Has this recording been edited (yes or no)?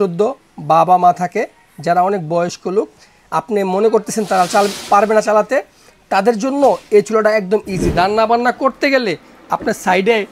yes